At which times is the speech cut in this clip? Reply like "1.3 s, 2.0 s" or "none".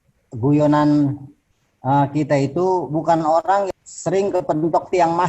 3.7 s